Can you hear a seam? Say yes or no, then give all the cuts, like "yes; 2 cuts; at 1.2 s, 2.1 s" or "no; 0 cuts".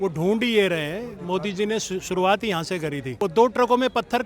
yes; 1 cut; at 3.1 s